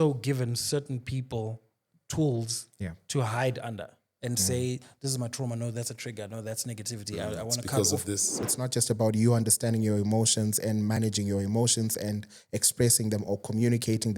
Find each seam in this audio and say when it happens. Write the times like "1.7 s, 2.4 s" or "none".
8.5 s